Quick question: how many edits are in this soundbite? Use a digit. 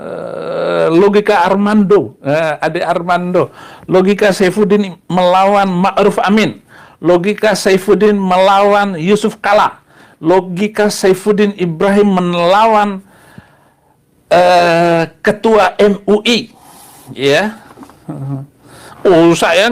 0